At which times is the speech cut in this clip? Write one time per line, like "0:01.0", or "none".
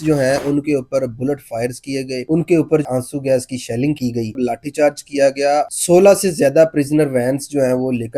0:02.8
0:04.3
0:05.7